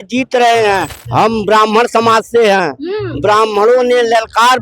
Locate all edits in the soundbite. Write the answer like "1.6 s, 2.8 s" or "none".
1.0 s